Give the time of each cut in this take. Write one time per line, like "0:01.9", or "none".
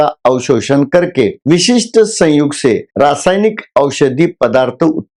none